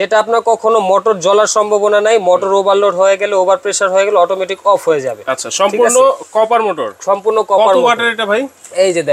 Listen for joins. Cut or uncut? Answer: uncut